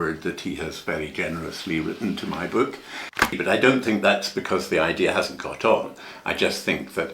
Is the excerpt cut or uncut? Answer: cut